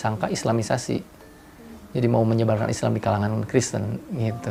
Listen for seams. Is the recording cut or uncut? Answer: uncut